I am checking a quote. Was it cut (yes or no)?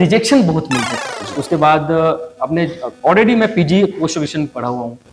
yes